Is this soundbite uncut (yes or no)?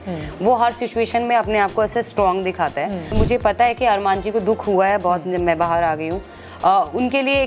no